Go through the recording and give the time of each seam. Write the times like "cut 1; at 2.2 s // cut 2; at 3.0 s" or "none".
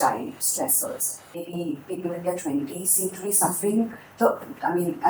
cut 1; at 1.5 s